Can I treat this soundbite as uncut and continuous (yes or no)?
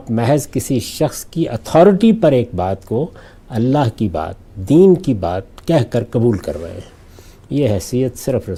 yes